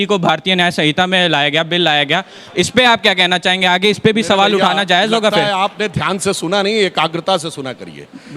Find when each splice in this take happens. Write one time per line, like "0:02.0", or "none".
none